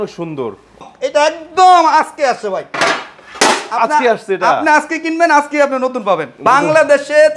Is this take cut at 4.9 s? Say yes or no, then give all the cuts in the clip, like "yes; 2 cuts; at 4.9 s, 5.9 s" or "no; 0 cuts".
no; 2 cuts; at 0.8 s, 6.4 s